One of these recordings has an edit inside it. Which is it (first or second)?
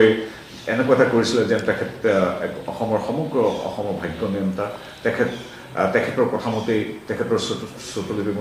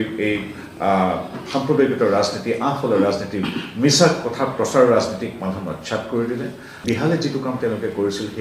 second